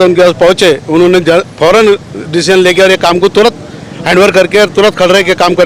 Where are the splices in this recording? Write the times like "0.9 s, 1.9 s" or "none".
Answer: none

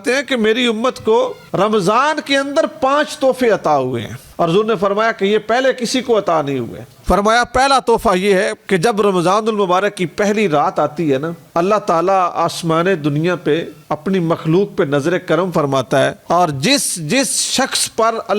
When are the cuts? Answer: 4.1 s, 6.9 s, 11.4 s

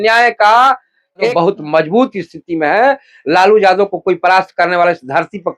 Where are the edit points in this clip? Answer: 1.3 s

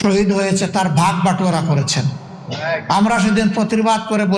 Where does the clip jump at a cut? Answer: none

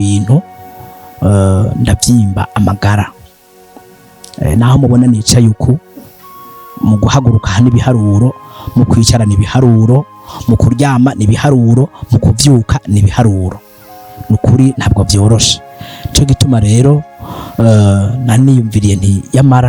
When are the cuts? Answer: none

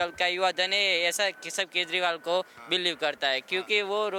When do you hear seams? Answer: none

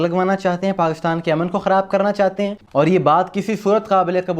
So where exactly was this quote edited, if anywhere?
2.6 s

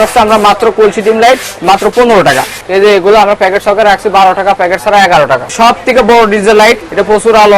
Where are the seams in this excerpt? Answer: 2.6 s, 5.5 s

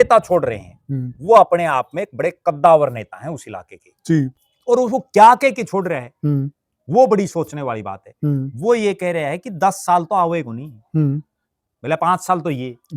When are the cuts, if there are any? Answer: 4.4 s

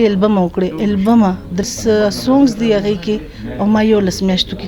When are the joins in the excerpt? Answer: 1.6 s

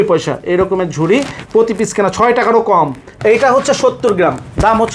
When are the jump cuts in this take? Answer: 3.1 s

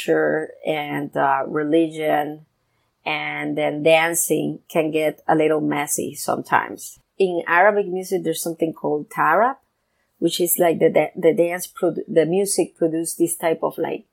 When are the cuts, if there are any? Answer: 7.0 s

